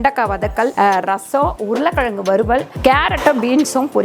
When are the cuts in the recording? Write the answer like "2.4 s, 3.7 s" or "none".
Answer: 0.7 s, 2.7 s